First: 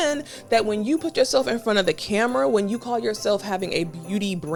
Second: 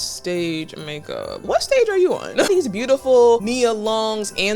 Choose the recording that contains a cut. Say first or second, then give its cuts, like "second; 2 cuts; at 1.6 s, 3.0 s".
second; 3 cuts; at 1.4 s, 2.5 s, 3.4 s